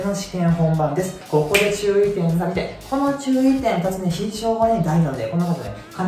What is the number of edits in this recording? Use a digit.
1